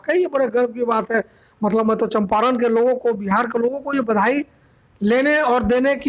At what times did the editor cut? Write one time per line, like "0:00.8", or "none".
none